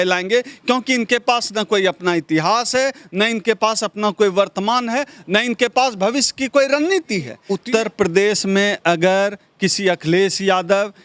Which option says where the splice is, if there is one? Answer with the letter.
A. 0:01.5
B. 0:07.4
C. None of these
B